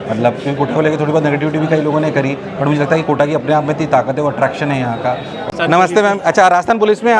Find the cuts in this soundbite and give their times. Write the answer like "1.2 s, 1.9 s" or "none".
5.3 s